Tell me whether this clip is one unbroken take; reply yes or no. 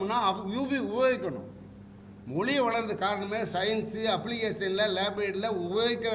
yes